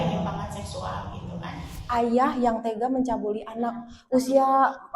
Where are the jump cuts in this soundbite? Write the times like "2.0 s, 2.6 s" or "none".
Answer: 1.8 s